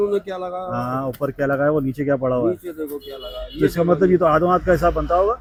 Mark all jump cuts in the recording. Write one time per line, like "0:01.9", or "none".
none